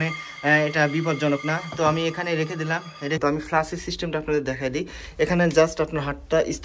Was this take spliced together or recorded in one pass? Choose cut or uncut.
cut